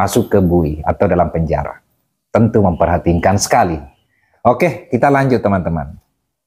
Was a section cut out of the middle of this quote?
no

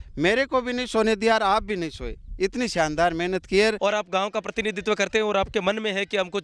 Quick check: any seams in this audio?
yes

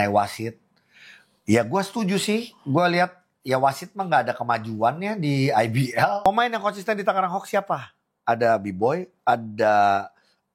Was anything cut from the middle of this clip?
yes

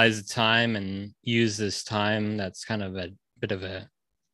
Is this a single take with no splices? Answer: yes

